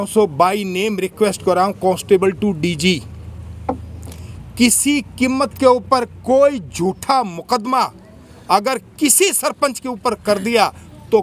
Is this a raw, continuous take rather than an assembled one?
yes; 0 cuts

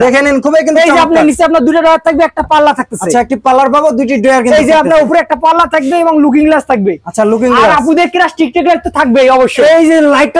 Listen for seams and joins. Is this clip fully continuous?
yes; 0 cuts

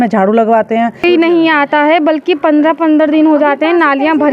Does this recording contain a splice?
yes; 1 cut; at 1.0 s

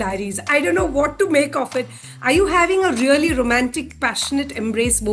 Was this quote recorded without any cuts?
no; 1 cut; at 2.0 s

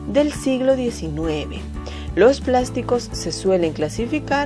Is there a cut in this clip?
yes; 1 cut; at 1.0 s

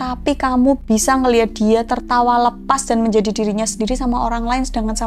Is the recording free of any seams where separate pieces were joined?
yes; 0 cuts

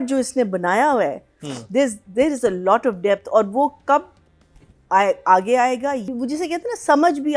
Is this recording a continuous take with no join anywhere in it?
no; 1 cut; at 6.1 s

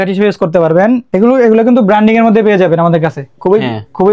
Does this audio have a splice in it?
yes; 1 cut; at 1.1 s

